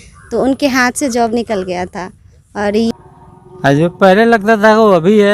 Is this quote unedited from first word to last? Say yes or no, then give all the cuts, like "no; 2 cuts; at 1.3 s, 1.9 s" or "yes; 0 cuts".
no; 1 cut; at 2.9 s